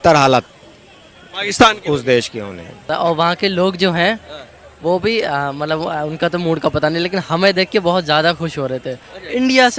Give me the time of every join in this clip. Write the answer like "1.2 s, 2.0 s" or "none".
2.8 s